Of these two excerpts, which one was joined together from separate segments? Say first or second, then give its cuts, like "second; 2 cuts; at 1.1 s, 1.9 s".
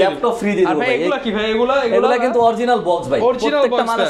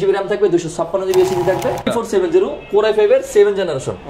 second; 1 cut; at 1.9 s